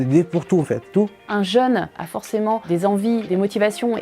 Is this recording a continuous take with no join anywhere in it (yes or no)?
no